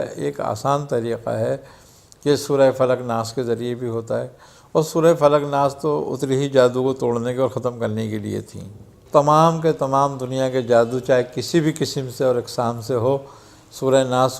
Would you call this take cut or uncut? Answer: cut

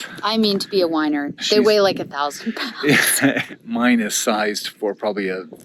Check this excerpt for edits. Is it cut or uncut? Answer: cut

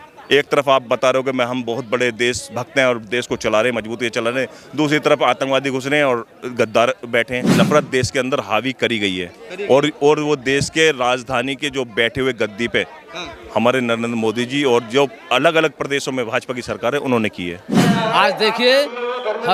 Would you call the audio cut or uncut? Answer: cut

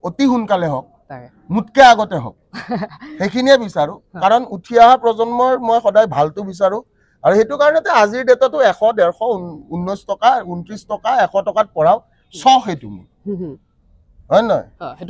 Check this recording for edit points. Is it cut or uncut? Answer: uncut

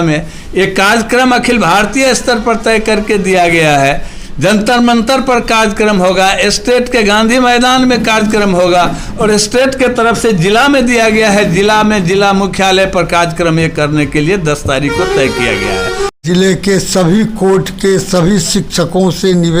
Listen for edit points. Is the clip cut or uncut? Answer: cut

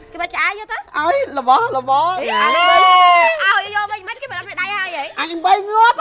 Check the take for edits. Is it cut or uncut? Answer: uncut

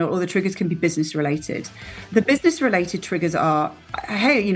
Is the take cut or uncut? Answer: uncut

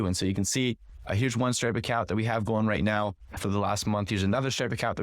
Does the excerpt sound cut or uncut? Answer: cut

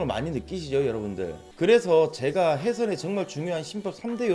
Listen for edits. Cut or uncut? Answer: cut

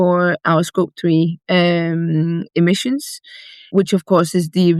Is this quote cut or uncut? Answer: cut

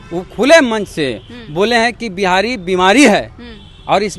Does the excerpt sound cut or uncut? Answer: uncut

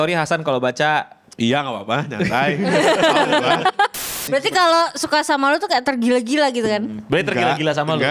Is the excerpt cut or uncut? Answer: cut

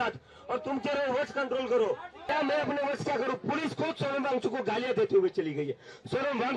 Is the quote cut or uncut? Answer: cut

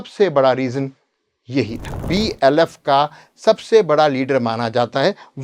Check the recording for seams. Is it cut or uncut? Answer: cut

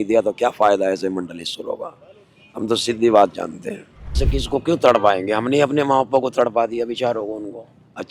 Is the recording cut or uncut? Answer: cut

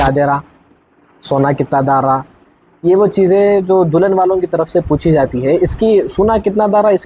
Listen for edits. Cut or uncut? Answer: uncut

